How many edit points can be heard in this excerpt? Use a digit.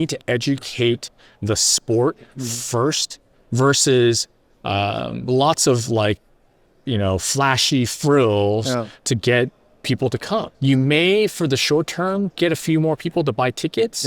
2